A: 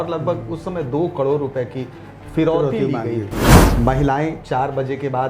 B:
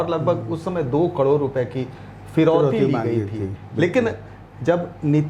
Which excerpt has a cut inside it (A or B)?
A